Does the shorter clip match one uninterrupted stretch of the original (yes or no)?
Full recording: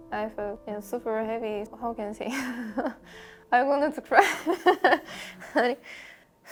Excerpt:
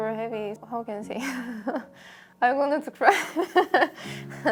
yes